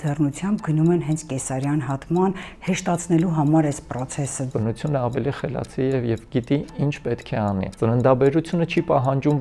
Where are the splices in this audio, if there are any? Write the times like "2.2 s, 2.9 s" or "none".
4.5 s, 7.7 s